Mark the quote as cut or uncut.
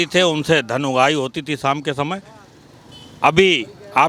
uncut